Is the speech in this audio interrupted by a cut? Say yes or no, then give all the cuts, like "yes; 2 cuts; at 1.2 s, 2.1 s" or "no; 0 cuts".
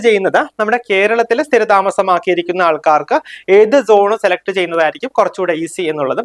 no; 0 cuts